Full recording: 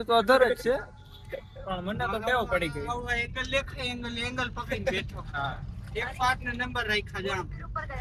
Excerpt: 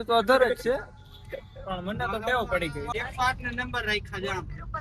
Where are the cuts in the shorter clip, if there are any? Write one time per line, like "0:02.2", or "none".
0:02.9

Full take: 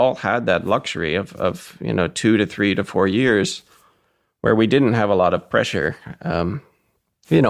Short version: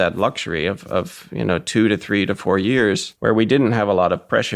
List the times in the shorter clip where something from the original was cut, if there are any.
0:03.1

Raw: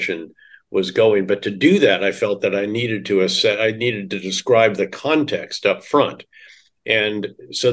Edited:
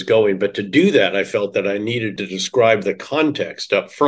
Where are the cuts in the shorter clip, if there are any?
0:02.1

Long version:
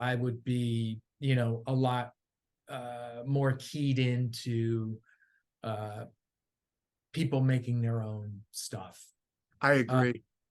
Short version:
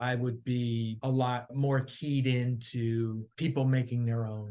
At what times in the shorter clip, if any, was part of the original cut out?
0:01.2
0:03.3

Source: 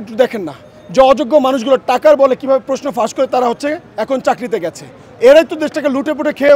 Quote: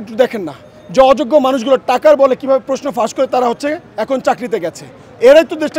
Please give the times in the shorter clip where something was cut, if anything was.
none

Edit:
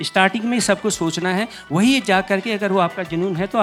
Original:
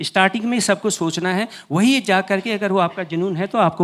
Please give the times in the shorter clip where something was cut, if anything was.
none

